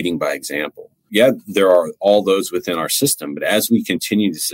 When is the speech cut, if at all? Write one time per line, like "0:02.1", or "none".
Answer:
0:01.0